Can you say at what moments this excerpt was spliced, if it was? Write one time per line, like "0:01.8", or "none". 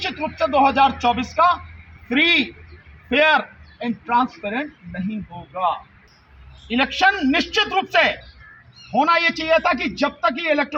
none